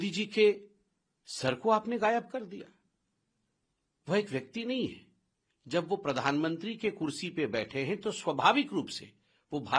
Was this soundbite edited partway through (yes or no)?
no